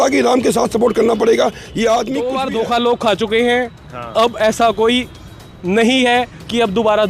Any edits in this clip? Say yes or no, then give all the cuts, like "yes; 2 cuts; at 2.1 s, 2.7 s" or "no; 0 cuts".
yes; 1 cut; at 2.3 s